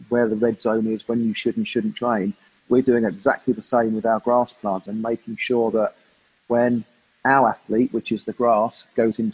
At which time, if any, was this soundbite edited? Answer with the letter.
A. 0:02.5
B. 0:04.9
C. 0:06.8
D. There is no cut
B